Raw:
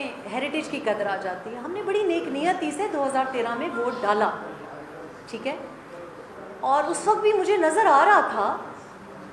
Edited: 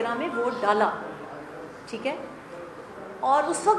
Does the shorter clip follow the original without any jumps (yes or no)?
yes